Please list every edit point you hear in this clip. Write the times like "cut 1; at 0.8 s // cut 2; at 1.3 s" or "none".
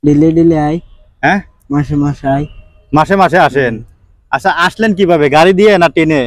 none